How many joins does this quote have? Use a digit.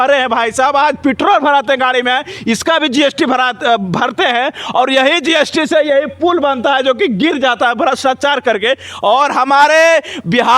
0